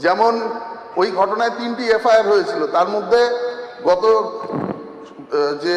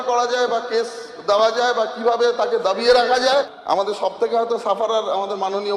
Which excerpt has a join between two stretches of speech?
second; 1 cut; at 3.2 s

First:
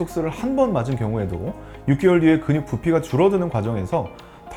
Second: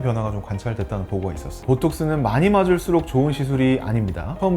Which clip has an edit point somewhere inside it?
second; 1 cut; at 1.6 s

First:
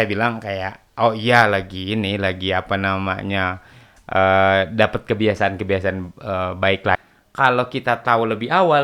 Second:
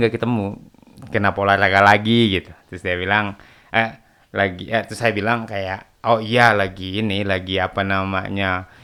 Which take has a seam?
first; 1 cut; at 7.0 s

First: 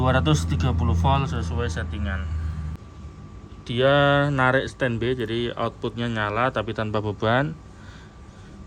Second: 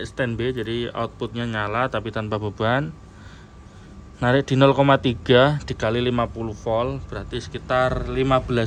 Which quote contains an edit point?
first; 1 cut; at 2.8 s

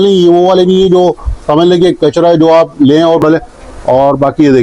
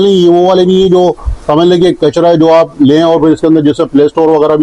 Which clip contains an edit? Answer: first; 1 cut; at 3.2 s

